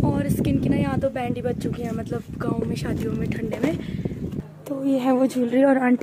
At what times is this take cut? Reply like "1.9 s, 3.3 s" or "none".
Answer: none